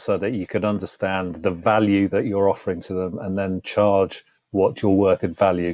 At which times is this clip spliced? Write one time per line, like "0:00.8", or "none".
none